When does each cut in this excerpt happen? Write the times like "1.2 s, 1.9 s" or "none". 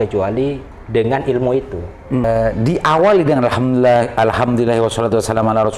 2.2 s